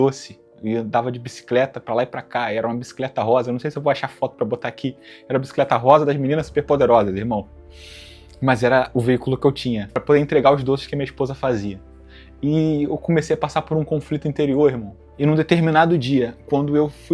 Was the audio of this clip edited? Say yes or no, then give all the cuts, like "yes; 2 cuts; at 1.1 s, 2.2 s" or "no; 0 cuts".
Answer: yes; 1 cut; at 9.9 s